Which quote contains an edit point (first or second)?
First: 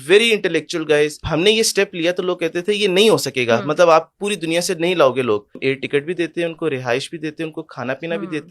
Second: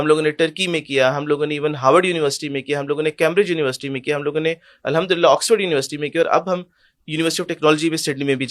first